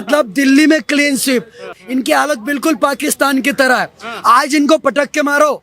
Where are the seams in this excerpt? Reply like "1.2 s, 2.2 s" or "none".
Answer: 1.7 s